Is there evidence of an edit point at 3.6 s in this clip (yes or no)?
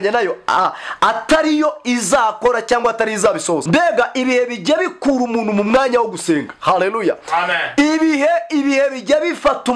yes